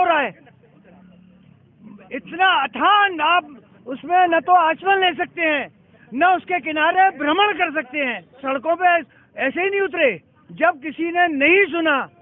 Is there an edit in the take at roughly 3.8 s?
no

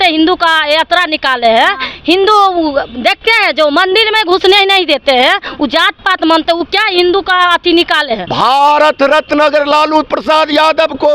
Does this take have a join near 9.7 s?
no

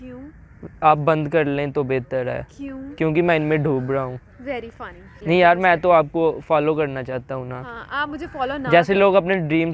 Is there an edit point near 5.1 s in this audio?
yes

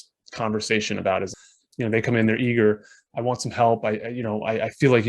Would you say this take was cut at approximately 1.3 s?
yes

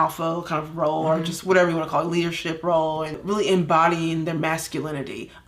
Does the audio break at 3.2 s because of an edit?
yes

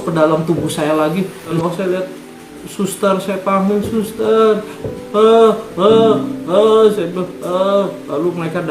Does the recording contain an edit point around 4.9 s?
no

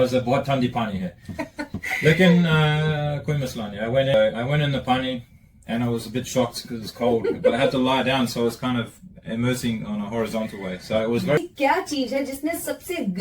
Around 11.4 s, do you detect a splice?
yes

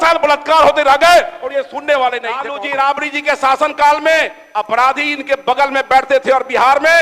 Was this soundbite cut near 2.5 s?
yes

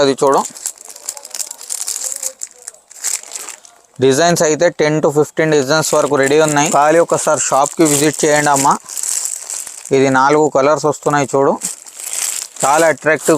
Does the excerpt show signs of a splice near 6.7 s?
yes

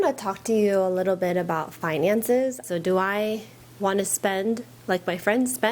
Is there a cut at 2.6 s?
yes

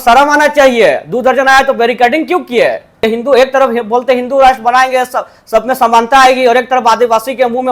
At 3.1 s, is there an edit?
yes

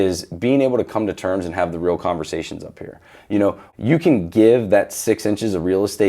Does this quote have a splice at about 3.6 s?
yes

